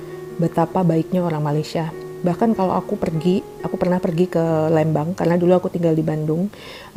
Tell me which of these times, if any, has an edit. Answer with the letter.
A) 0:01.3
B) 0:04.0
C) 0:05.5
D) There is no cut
D